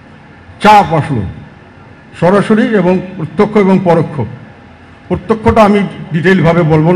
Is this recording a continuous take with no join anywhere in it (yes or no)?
yes